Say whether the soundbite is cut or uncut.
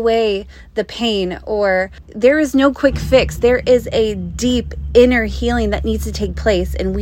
cut